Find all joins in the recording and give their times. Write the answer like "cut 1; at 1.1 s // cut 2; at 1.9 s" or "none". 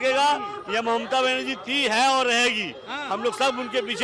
none